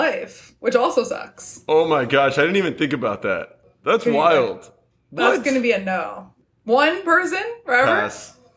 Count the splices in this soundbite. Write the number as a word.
zero